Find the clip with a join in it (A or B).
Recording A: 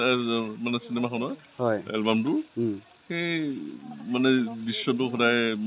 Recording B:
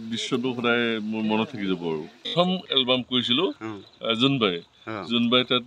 B